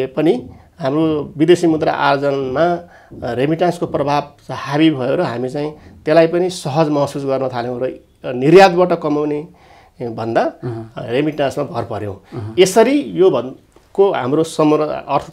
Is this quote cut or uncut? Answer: uncut